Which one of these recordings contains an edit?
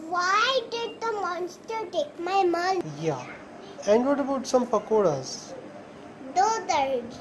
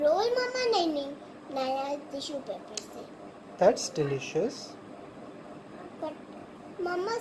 first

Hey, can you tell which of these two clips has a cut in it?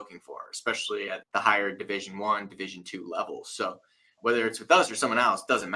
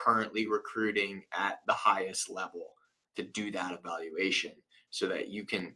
first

